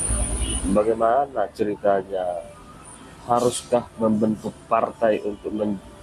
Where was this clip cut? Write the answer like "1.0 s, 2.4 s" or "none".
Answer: none